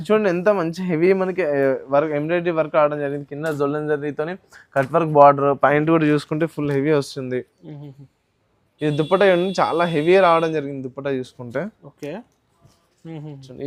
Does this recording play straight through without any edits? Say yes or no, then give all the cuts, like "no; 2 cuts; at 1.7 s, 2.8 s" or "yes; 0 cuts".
yes; 0 cuts